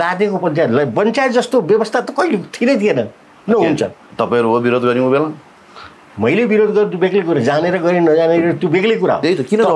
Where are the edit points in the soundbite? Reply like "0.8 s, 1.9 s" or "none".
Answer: none